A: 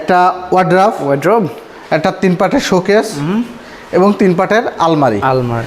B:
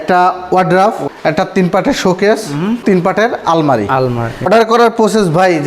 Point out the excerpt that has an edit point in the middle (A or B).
B